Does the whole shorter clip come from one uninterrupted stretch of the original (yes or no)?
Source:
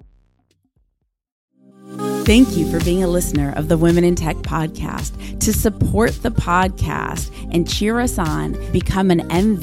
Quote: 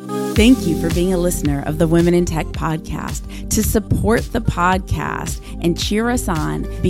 yes